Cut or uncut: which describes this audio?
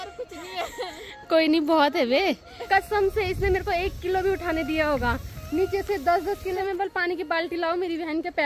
cut